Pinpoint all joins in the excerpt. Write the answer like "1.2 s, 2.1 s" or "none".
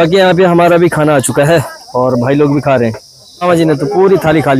3.4 s